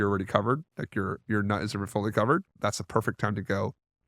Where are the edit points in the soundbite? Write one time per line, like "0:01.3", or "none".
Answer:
0:02.6